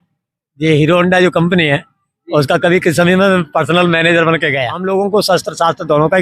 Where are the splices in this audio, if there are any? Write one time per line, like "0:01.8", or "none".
0:04.8